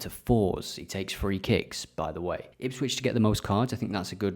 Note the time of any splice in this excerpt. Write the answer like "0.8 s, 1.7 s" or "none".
2.5 s